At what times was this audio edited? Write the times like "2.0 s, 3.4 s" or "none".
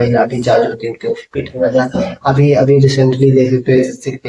none